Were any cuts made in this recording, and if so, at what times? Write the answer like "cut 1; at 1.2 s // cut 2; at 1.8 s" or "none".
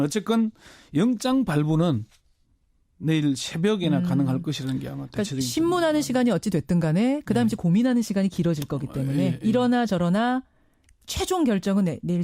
cut 1; at 6.9 s